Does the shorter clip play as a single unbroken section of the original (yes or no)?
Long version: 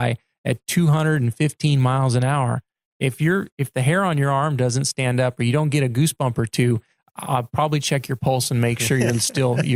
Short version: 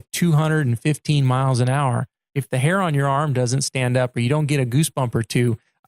no